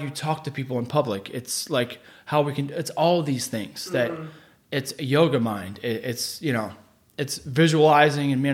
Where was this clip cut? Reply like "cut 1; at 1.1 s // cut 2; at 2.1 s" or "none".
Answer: none